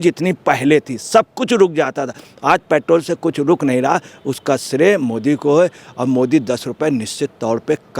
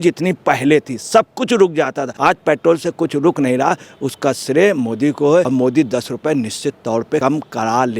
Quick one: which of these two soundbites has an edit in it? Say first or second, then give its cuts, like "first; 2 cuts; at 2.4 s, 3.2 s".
second; 3 cuts; at 2.0 s, 5.5 s, 7.2 s